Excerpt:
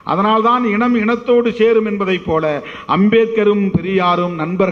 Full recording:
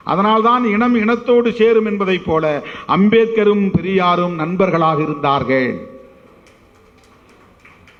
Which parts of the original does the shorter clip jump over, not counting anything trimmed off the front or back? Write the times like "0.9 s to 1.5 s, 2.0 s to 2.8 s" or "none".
none